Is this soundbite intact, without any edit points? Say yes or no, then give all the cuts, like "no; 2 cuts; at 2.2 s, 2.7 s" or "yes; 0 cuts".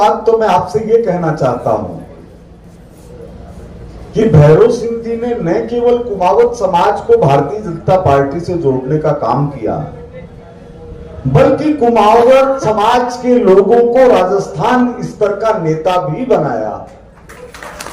yes; 0 cuts